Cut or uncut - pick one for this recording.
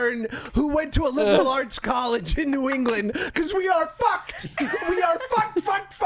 uncut